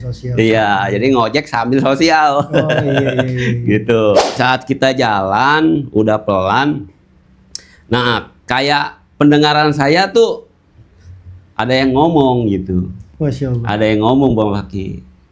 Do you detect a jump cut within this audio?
yes; 1 cut; at 4.4 s

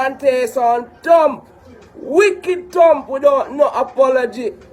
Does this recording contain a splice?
no; 0 cuts

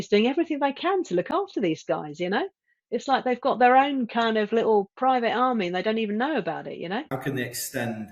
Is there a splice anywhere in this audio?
yes; 1 cut; at 7.1 s

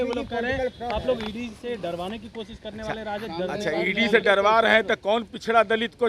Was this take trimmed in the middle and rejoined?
no; 0 cuts

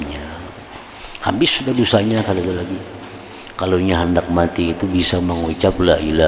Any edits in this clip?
no; 0 cuts

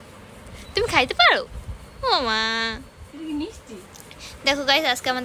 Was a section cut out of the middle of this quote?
no; 0 cuts

